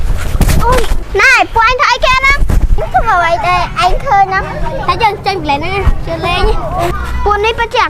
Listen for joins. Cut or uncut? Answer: cut